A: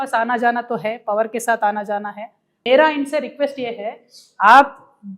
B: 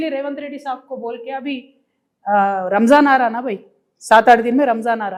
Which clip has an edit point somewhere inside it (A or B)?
A